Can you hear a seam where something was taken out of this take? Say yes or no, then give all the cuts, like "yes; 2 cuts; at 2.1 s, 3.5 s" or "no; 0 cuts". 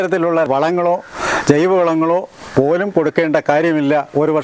no; 0 cuts